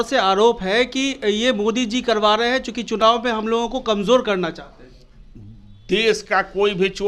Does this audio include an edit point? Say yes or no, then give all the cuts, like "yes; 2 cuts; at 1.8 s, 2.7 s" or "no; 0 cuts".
no; 0 cuts